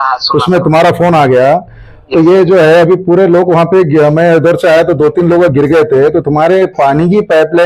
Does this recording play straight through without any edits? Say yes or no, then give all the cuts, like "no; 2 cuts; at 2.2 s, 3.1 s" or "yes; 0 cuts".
yes; 0 cuts